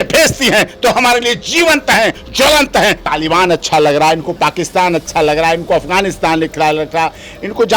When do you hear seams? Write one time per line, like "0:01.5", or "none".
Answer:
0:03.0